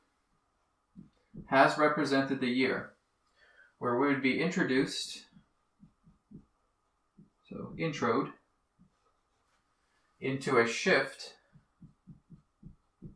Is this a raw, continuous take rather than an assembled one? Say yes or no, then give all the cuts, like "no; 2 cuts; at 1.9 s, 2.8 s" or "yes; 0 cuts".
no; 1 cut; at 1.9 s